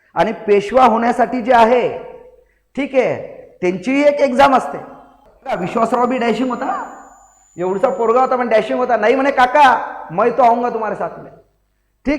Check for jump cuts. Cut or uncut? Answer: cut